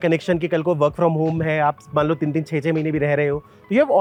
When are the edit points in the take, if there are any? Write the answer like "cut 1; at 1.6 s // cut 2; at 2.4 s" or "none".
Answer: none